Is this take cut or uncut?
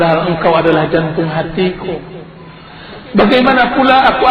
cut